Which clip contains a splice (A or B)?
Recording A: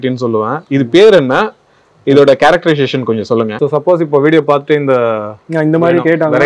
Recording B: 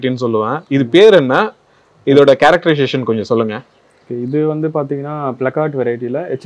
A